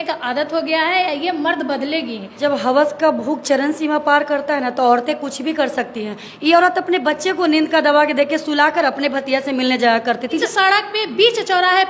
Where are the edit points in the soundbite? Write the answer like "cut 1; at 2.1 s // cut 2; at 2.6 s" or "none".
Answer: cut 1; at 2.2 s // cut 2; at 10.4 s